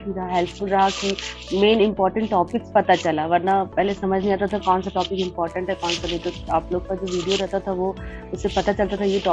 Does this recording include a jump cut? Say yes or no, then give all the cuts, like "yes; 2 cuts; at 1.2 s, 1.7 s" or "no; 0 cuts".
no; 0 cuts